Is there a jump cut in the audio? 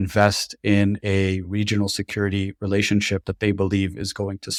no; 0 cuts

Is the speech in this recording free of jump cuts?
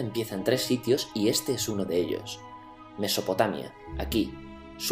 no; 1 cut; at 3.5 s

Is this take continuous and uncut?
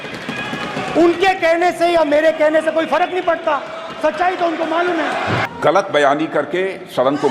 no; 1 cut; at 5.4 s

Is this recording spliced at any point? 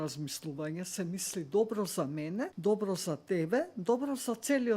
yes; 1 cut; at 2.5 s

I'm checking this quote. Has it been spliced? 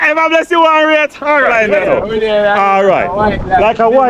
yes; 1 cut; at 1.6 s

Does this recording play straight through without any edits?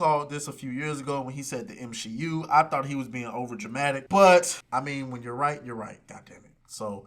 no; 2 cuts; at 4.0 s, 4.6 s

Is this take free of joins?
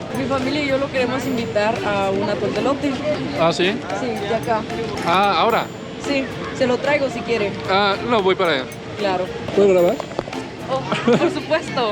no; 1 cut; at 9.4 s

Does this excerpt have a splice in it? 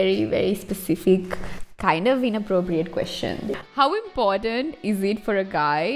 yes; 1 cut; at 3.6 s

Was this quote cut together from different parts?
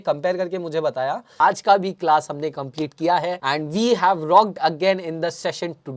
yes; 2 cuts; at 1.2 s, 3.4 s

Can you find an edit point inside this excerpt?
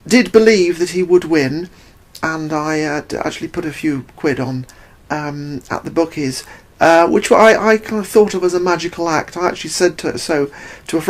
yes; 1 cut; at 9.2 s

